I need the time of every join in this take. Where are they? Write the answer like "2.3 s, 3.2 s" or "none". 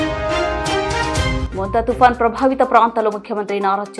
1.4 s